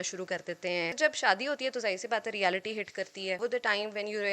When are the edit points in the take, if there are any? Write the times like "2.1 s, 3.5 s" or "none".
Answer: 1.0 s, 3.4 s